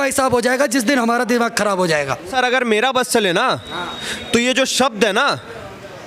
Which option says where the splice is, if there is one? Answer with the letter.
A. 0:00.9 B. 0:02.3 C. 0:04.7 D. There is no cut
B